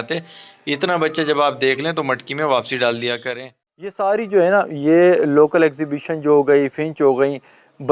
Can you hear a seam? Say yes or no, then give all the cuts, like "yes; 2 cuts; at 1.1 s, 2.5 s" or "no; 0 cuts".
yes; 1 cut; at 4.0 s